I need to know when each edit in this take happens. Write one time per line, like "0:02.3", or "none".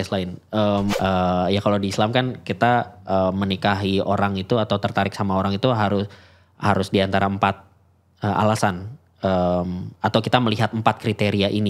0:00.9